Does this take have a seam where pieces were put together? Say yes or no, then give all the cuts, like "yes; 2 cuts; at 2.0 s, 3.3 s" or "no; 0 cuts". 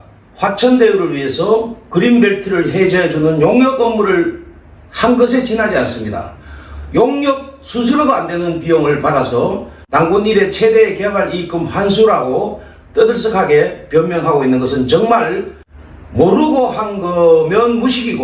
no; 0 cuts